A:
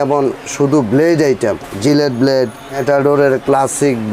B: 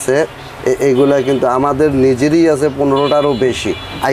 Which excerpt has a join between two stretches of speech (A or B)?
A